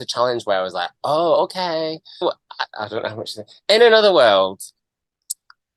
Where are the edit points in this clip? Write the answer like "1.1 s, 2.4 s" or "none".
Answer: 2.2 s